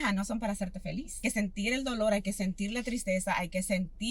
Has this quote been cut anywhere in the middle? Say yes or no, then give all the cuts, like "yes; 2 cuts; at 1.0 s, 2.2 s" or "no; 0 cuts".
yes; 1 cut; at 1.2 s